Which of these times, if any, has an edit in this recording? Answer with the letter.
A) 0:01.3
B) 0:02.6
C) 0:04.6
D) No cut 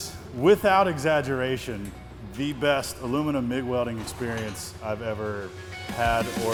D